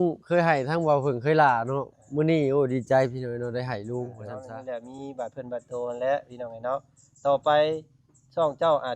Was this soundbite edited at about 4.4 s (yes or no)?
yes